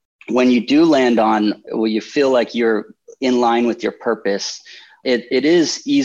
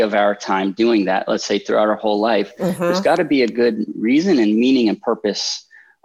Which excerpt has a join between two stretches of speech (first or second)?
first